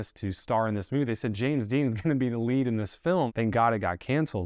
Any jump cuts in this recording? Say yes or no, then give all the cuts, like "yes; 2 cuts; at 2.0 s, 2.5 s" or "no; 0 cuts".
yes; 1 cut; at 3.3 s